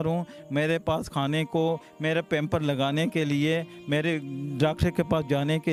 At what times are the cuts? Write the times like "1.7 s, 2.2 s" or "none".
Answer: none